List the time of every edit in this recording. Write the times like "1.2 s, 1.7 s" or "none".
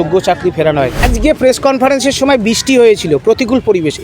1.0 s